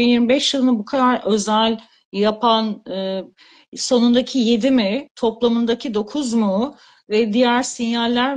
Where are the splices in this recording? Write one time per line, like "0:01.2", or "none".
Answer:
none